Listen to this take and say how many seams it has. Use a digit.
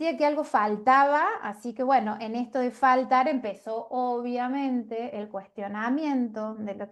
0